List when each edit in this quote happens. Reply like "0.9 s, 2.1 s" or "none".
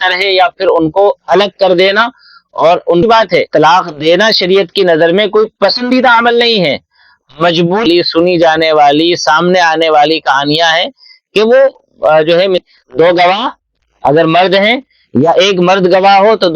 3.0 s, 7.8 s, 12.6 s